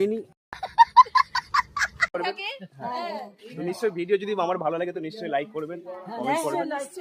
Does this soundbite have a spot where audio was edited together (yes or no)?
yes